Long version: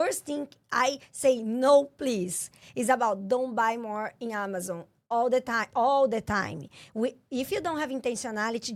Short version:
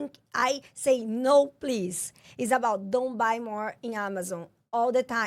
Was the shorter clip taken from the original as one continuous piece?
yes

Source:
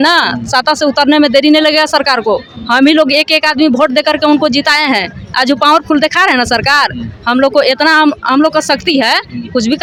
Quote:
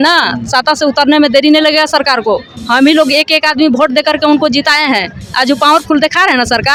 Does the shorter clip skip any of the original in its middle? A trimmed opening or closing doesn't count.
no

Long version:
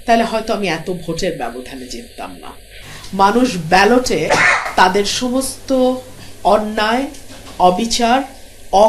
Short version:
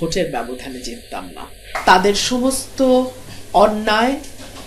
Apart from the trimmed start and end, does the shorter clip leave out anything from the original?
yes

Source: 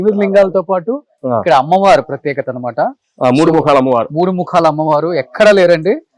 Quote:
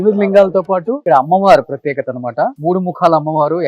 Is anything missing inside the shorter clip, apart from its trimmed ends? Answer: yes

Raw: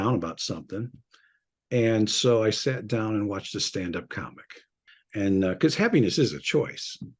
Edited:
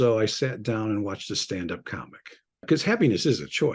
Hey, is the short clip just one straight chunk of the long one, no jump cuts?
no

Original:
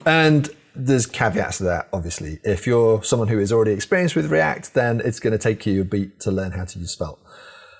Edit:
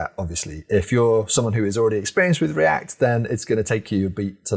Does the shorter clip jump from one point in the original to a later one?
no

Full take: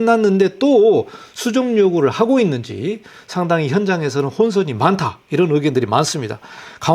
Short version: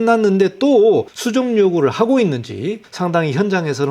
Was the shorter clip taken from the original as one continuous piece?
no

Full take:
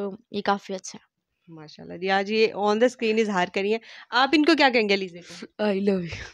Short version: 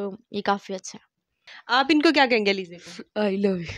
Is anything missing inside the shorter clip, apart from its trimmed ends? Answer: yes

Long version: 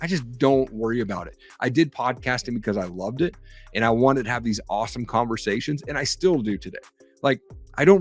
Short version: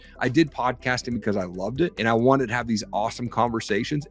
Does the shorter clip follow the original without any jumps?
no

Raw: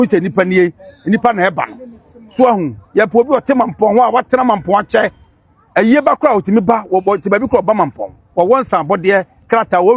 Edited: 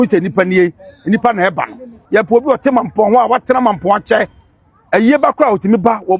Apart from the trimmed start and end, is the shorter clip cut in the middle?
yes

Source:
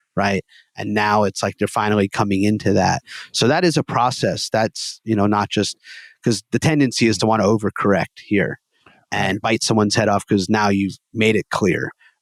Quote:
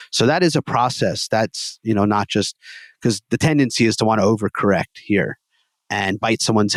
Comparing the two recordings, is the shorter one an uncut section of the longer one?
yes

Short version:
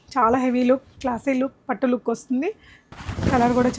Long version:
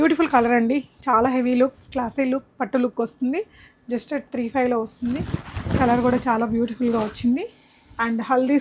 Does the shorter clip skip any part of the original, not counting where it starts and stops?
yes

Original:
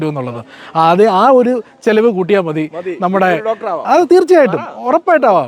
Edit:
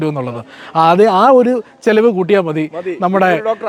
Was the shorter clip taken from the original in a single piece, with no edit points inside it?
yes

